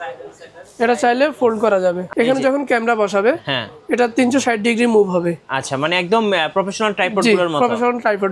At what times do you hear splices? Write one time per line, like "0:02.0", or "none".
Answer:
0:02.0